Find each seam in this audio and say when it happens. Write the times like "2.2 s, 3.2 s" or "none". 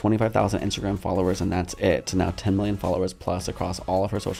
none